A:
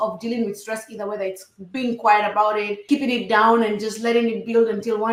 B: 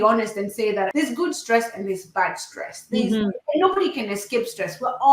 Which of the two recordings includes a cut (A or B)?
B